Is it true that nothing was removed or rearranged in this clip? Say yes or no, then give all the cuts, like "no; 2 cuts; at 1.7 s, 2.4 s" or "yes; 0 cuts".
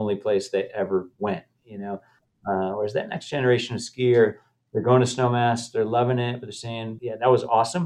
no; 1 cut; at 6.9 s